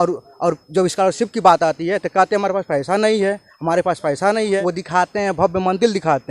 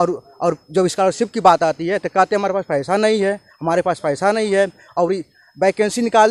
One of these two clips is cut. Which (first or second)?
first